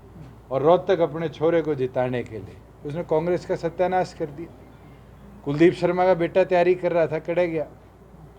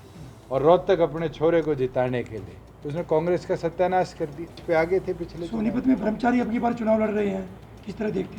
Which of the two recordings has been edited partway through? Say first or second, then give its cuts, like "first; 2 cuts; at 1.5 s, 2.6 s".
second; 1 cut; at 4.6 s